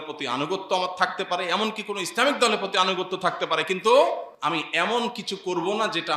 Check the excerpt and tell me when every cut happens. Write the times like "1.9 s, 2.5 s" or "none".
4.3 s

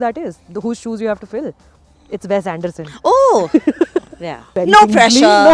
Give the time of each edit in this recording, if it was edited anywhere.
4.4 s

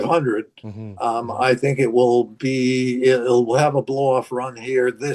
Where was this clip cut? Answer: none

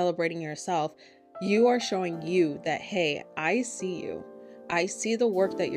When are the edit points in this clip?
none

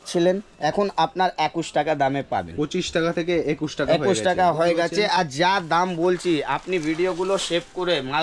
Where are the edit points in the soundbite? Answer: none

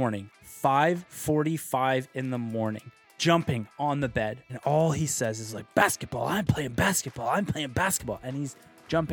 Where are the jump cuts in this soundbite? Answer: 3.1 s, 4.4 s

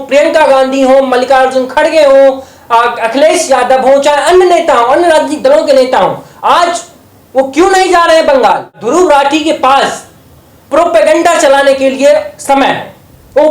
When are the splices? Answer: 8.8 s

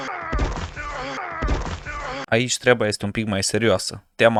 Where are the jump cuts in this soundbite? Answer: none

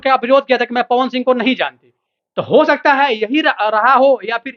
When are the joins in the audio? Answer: none

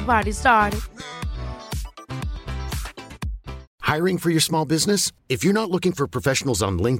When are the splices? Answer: 3.6 s

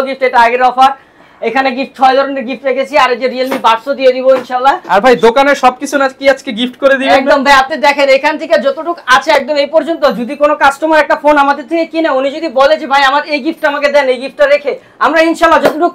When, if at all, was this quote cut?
none

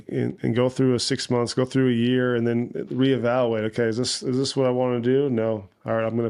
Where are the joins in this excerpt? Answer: none

